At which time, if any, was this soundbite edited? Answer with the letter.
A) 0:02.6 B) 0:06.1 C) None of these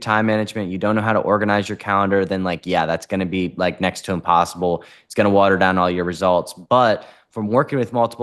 C